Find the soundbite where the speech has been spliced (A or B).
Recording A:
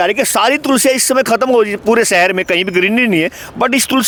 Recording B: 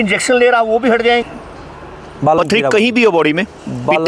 B